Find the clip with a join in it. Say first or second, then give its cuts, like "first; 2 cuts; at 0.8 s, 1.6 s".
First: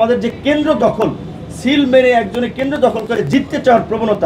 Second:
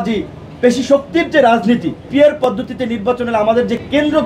second; 1 cut; at 2.0 s